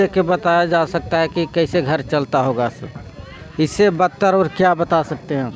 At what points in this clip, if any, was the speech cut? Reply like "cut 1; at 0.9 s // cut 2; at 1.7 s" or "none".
none